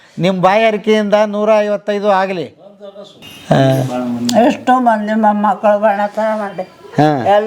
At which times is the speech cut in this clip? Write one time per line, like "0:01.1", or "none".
0:03.3